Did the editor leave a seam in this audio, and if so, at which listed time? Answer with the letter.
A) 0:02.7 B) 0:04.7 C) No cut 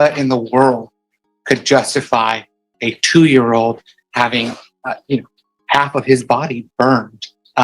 B